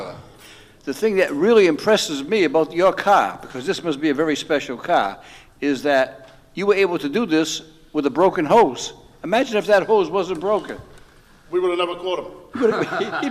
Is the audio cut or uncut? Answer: uncut